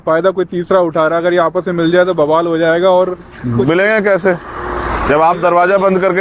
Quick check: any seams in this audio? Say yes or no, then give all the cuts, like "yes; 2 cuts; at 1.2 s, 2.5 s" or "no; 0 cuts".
no; 0 cuts